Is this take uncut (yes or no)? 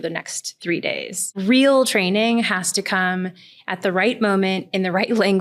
no